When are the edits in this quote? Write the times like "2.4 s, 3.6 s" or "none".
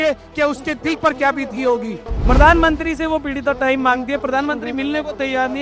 2.1 s